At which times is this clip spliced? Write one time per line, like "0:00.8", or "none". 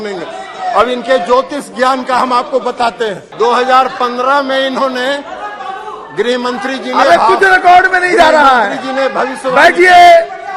0:03.3